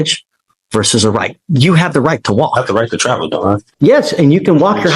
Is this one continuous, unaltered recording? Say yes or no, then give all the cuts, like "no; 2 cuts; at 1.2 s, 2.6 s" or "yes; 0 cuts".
no; 1 cut; at 3.7 s